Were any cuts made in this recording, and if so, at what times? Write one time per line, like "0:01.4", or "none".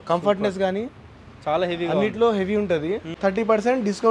0:03.1